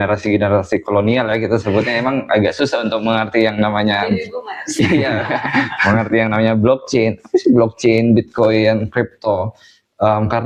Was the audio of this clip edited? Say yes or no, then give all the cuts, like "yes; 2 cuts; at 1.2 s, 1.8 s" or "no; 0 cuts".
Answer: no; 0 cuts